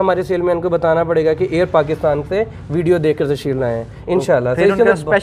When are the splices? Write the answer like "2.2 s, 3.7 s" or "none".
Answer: none